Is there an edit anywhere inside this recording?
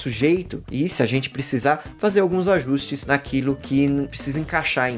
yes; 1 cut; at 4.1 s

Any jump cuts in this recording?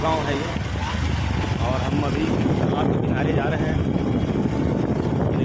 no; 0 cuts

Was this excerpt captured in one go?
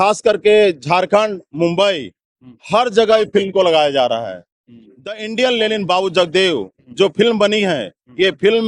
no; 1 cut; at 5.2 s

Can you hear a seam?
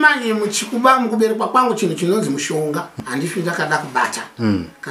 yes; 1 cut; at 3.0 s

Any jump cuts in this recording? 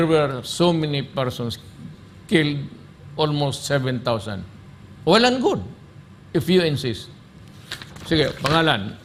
no; 0 cuts

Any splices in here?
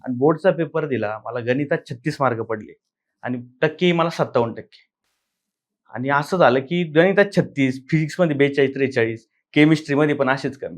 no; 0 cuts

